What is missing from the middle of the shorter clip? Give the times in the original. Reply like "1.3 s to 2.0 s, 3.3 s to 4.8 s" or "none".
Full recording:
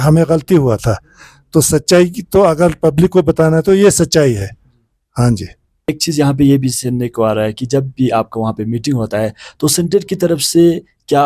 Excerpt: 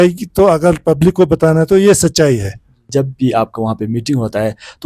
4.8 s to 7.6 s